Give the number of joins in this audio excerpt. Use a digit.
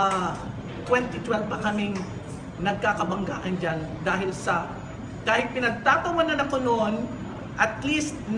0